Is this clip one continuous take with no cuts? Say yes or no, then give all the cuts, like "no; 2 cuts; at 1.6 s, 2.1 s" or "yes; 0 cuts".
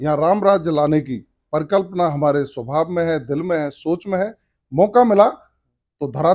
yes; 0 cuts